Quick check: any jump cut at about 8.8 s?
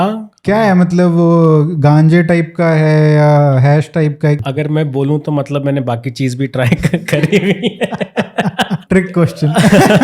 yes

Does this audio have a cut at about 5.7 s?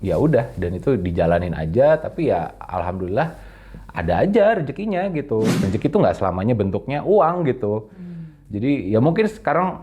yes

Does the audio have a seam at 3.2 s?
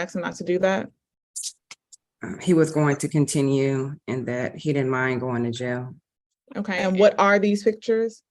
no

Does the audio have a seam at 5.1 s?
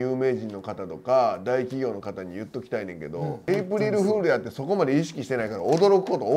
no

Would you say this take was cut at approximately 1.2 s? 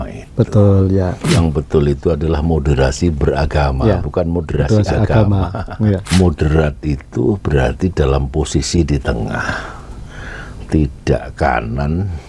yes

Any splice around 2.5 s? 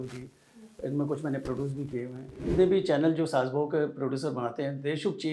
yes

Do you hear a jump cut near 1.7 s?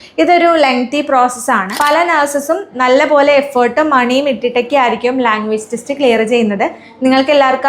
yes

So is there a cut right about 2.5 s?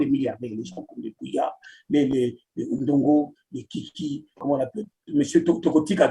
no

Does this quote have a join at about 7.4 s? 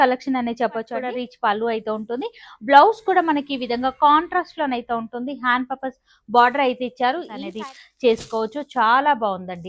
yes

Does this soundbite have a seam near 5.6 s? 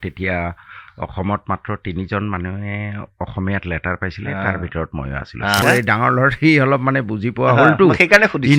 yes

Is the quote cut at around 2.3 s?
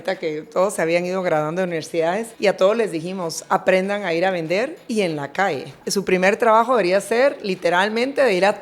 yes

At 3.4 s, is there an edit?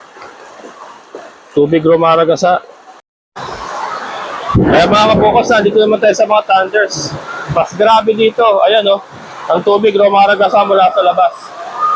yes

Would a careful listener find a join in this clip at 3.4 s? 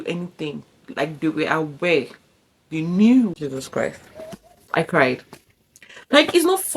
yes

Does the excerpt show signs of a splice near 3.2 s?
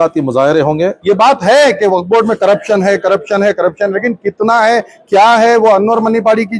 no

